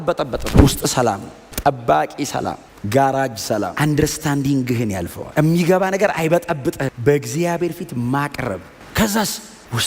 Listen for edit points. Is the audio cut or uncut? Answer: cut